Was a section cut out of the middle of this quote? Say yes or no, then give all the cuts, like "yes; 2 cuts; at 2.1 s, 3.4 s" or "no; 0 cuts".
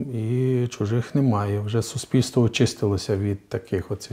no; 0 cuts